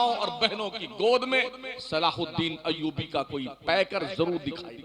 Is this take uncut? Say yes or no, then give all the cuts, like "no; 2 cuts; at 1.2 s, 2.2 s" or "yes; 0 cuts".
yes; 0 cuts